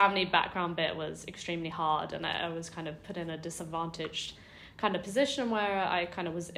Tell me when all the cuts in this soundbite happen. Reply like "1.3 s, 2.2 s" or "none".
none